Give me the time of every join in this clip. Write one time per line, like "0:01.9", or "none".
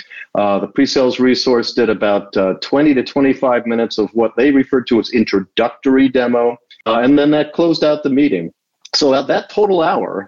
0:06.7